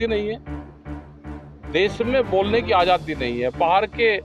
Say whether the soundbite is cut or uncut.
uncut